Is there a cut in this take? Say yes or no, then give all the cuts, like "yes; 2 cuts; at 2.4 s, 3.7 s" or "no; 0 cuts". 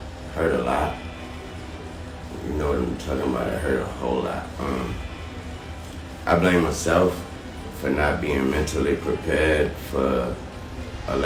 no; 0 cuts